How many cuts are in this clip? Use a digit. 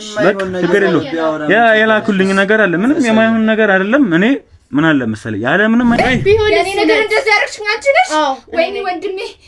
1